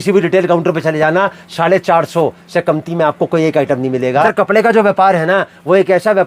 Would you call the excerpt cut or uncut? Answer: cut